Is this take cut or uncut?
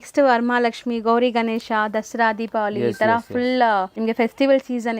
cut